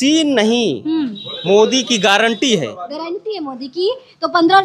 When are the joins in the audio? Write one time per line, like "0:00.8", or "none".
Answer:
none